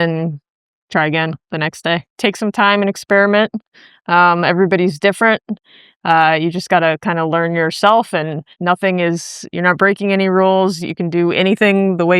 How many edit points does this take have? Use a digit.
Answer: 2